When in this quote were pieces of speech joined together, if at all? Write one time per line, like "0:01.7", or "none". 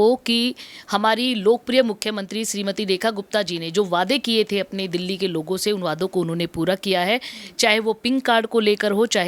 none